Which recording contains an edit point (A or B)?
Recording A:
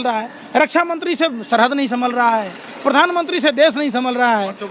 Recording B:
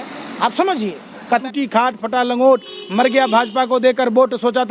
B